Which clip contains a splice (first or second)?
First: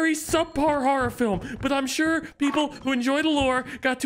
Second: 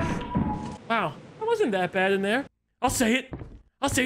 second